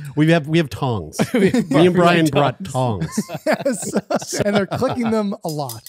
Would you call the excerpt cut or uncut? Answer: cut